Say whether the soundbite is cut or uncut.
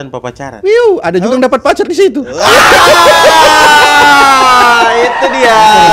uncut